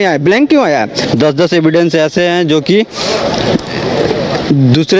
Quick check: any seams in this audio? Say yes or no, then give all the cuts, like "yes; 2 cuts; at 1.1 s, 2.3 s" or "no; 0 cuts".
yes; 1 cut; at 1.0 s